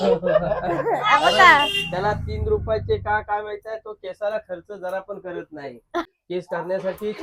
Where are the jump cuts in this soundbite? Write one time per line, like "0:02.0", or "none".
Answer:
0:06.2